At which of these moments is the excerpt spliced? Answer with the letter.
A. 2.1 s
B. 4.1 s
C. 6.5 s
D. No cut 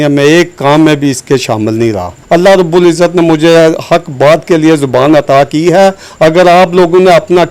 A